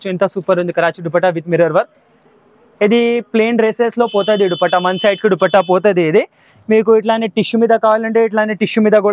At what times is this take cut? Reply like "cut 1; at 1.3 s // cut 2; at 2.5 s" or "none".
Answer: none